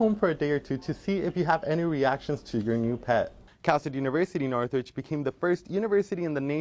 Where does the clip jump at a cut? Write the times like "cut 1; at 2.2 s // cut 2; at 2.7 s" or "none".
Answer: cut 1; at 3.4 s